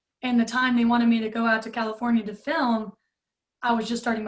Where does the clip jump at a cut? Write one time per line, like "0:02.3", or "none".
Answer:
none